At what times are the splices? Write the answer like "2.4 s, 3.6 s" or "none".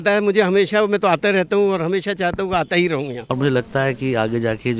3.2 s